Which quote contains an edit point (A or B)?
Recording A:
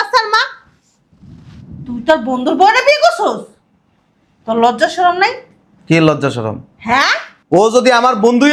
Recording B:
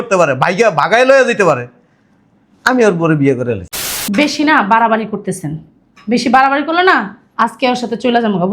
B